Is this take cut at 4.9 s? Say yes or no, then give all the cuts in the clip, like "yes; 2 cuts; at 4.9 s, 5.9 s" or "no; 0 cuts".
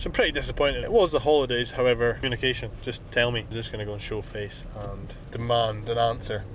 no; 3 cuts; at 0.8 s, 2.2 s, 3.5 s